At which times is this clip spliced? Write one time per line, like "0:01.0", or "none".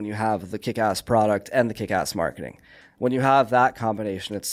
none